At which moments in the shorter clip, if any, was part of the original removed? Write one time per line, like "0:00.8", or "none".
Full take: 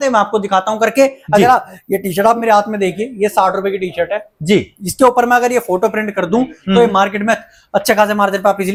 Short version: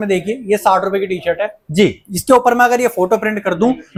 none

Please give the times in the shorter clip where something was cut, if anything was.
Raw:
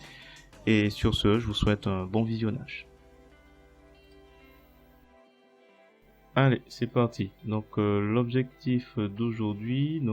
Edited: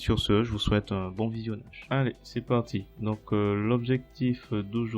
0:01.7

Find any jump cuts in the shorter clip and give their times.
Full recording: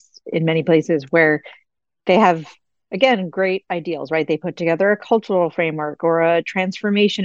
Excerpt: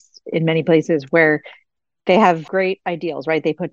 0:02.4

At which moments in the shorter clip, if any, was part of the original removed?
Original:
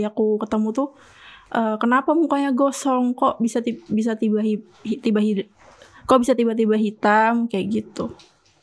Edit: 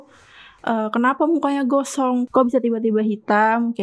0:02.3

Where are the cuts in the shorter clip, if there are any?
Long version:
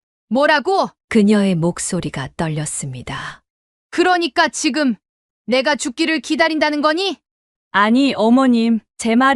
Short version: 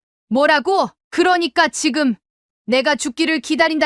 0:01.0

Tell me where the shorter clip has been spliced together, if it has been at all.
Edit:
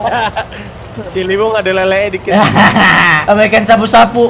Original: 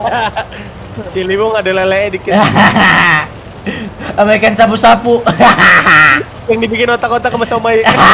0:03.2

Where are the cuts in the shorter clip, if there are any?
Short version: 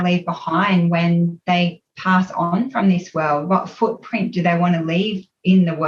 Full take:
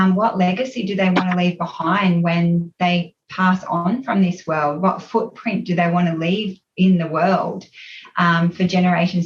none

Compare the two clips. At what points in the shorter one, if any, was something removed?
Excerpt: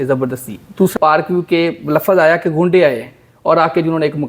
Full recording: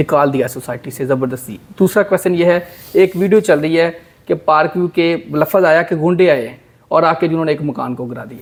0:00.9

